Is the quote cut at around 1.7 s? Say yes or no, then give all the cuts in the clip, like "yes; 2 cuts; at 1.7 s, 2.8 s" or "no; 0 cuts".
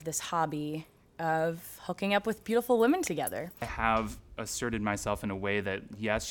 no; 1 cut; at 3.7 s